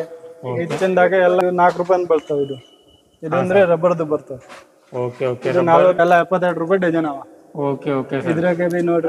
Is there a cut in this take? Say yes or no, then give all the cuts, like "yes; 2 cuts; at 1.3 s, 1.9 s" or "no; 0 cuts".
yes; 1 cut; at 6.0 s